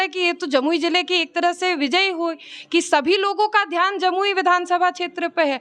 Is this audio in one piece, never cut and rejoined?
yes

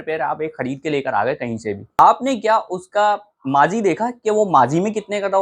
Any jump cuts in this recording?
yes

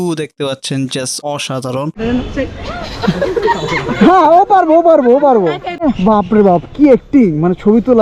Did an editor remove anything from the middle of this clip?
yes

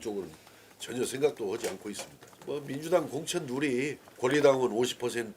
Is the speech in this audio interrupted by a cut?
yes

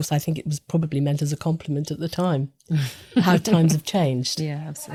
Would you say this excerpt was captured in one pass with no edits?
yes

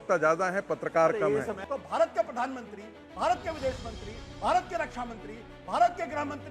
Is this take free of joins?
no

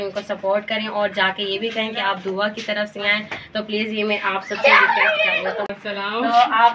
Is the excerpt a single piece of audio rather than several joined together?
no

